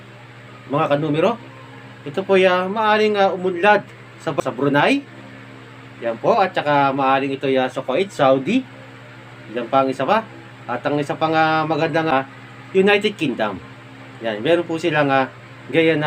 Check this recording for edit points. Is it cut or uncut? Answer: cut